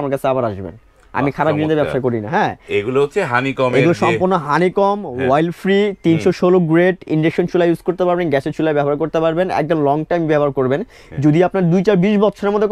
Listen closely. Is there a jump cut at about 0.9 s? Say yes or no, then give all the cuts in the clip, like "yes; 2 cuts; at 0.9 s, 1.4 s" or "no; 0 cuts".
no; 0 cuts